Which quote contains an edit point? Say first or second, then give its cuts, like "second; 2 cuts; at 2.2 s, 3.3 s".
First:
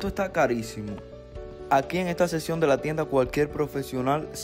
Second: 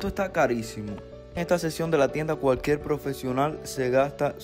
second; 1 cut; at 1.4 s